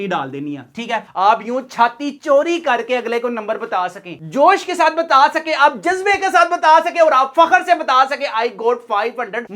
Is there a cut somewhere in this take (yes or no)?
yes